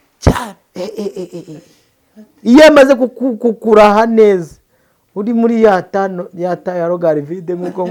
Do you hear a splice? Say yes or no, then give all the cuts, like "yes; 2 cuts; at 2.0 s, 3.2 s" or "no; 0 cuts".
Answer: no; 0 cuts